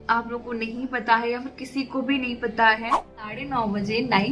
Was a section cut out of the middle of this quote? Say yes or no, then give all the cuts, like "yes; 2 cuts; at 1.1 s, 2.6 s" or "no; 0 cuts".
yes; 1 cut; at 3.4 s